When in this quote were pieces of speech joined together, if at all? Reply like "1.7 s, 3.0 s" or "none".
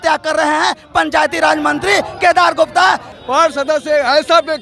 3.1 s